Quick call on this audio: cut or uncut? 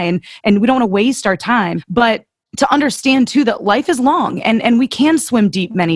cut